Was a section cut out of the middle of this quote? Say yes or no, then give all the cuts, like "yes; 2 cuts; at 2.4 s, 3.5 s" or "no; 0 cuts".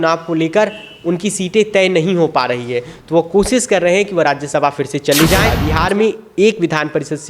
yes; 1 cut; at 5.6 s